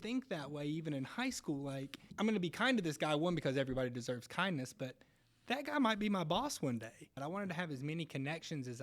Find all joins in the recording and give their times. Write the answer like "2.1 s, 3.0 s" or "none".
2.0 s, 7.2 s